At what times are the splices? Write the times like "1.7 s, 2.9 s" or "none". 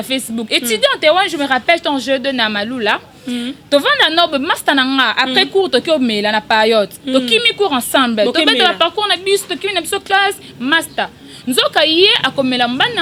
none